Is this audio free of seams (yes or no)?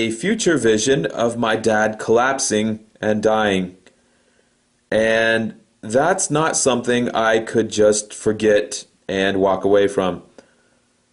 no